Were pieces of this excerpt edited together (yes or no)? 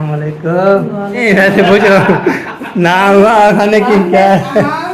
yes